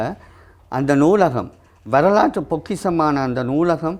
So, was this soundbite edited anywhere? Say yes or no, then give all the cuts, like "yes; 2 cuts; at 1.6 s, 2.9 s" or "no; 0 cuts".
no; 0 cuts